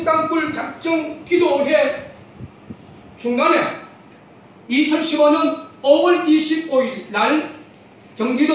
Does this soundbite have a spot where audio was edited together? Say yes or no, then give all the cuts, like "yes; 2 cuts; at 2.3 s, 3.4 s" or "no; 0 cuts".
yes; 1 cut; at 2.9 s